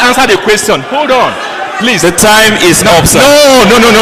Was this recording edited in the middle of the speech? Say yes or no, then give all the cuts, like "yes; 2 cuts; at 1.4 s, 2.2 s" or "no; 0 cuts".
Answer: no; 0 cuts